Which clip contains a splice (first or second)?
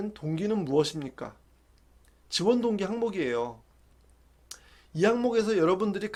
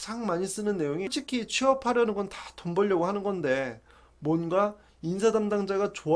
second